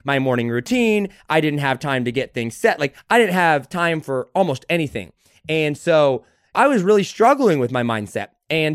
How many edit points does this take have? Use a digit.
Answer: 1